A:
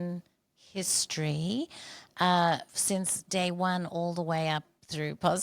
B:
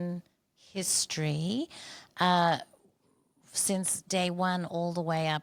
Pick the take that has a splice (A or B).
A